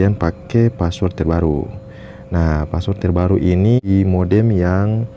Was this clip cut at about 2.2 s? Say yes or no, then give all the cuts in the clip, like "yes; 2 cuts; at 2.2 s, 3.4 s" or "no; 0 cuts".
no; 1 cut; at 3.8 s